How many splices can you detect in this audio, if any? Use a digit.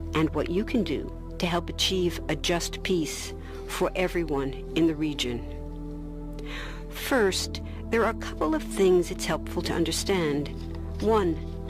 1